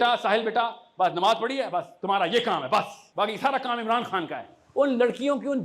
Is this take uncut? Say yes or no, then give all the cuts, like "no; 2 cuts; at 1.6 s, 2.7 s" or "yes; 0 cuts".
no; 2 cuts; at 3.0 s, 4.6 s